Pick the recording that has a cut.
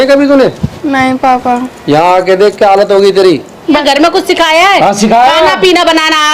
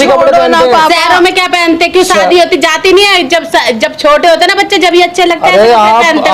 first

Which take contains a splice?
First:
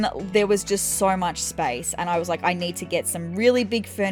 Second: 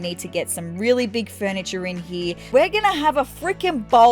second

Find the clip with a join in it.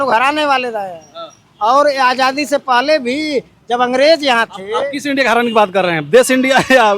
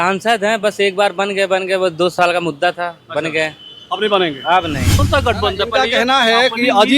second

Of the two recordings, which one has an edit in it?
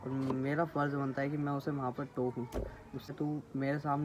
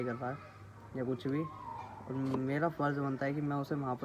first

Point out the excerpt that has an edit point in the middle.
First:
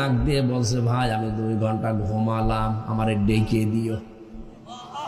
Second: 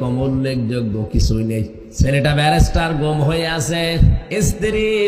second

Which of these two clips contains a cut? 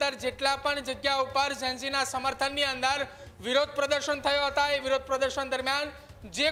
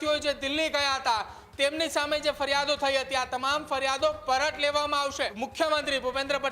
second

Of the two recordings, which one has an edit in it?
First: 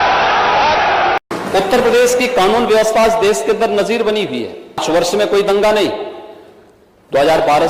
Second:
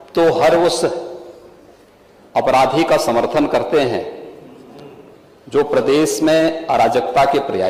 first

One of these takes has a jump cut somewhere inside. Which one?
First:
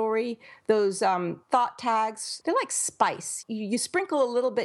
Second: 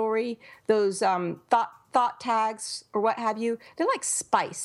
first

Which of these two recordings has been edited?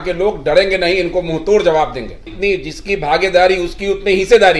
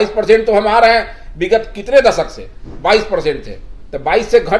first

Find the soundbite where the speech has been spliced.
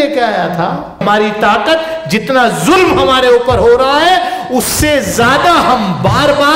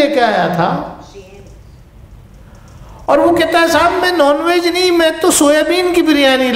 first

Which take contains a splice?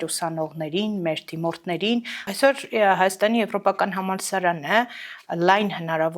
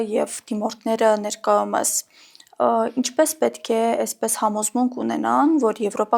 first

